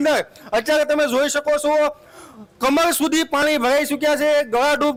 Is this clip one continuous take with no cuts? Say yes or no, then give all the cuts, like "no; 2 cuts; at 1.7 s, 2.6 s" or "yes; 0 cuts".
yes; 0 cuts